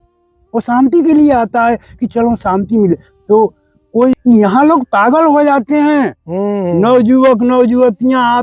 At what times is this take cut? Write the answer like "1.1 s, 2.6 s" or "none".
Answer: 4.2 s